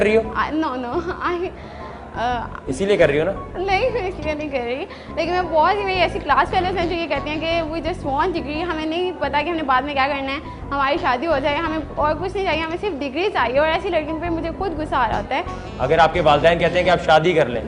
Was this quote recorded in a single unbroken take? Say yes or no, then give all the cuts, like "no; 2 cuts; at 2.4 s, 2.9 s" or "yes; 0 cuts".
yes; 0 cuts